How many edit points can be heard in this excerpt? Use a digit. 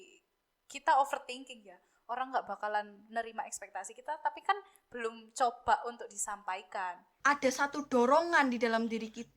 1